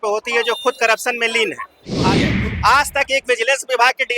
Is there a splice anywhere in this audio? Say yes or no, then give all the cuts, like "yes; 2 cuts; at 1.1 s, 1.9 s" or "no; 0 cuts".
yes; 1 cut; at 1.9 s